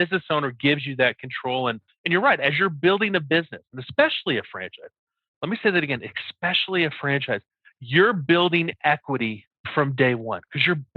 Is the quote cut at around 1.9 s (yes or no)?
yes